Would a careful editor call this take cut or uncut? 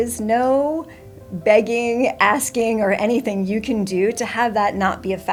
uncut